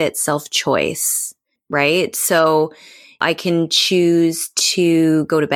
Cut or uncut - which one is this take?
cut